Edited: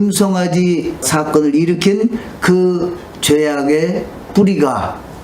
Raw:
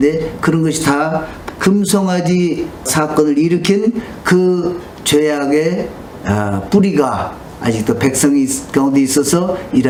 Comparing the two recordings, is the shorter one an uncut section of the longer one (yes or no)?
no